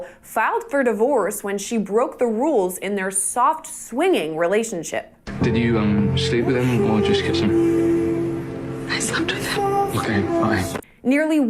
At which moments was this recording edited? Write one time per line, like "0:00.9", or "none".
0:10.0